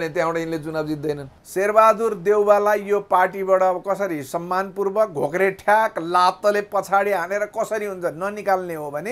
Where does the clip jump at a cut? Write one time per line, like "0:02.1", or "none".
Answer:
0:01.3

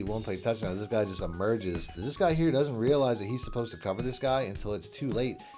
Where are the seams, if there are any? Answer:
0:02.0

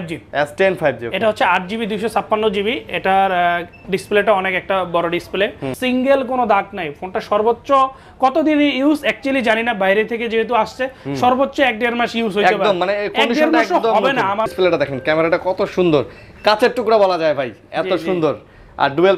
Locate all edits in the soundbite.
0:05.7
0:14.5

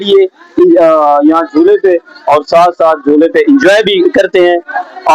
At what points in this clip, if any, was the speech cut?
none

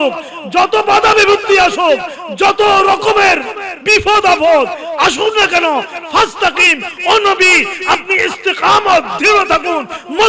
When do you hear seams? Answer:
none

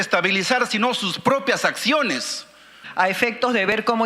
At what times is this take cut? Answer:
0:02.8

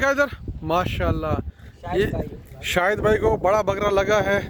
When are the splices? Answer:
none

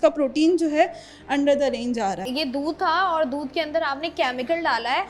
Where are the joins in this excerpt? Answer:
0:02.3

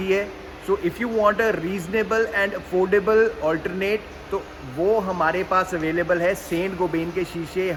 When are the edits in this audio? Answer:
none

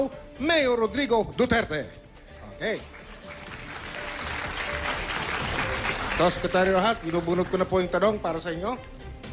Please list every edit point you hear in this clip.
0:01.1

